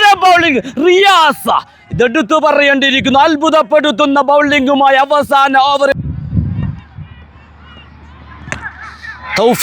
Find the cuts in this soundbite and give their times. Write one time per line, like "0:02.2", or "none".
0:05.9